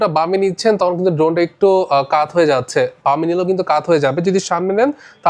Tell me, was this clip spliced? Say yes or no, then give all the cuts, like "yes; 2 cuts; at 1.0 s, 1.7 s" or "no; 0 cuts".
no; 0 cuts